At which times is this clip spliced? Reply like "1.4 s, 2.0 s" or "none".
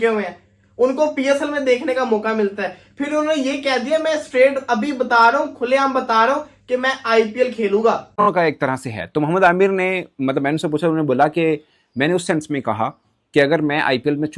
8.2 s